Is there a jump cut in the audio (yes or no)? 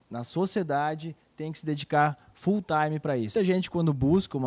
yes